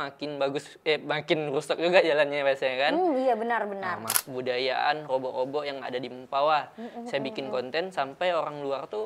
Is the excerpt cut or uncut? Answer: cut